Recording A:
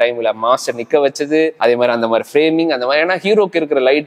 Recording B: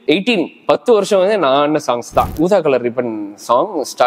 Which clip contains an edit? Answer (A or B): B